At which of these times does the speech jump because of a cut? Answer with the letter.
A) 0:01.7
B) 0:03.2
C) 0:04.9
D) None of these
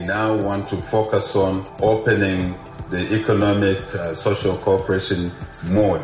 A